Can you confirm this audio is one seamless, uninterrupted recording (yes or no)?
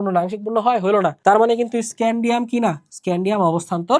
yes